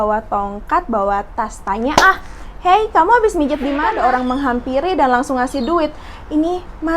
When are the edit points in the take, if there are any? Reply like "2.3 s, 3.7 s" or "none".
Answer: 3.9 s